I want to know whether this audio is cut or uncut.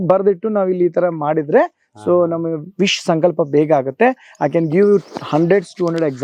uncut